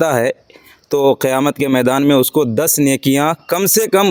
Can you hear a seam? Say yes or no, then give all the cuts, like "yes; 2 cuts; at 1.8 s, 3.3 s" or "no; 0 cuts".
no; 0 cuts